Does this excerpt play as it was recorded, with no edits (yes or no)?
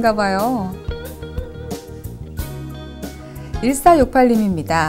no